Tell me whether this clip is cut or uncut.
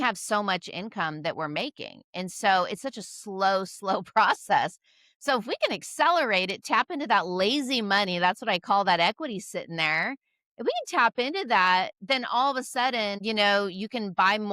cut